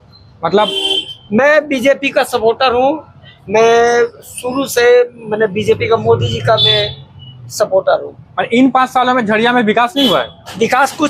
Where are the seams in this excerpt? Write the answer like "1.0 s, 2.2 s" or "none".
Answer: none

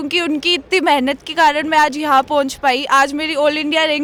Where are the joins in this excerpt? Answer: none

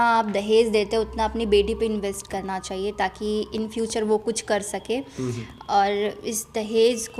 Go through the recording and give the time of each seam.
none

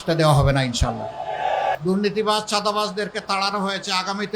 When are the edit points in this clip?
1.8 s

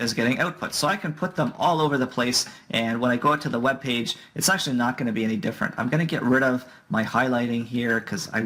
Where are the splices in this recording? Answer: none

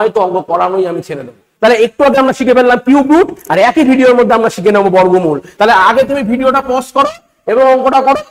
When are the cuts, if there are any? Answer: 1.4 s, 5.4 s

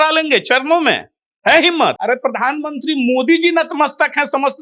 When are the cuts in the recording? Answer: 2.0 s

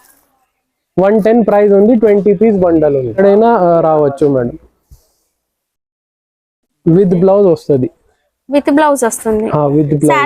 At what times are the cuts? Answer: 3.2 s

